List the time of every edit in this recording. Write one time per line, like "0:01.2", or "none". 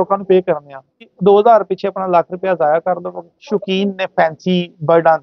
0:01.1
0:03.4